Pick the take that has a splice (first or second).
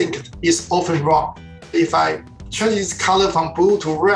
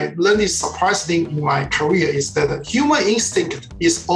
first